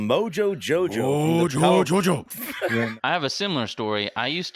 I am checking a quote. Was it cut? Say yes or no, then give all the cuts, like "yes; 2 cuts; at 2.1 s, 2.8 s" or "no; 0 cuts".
yes; 1 cut; at 2.9 s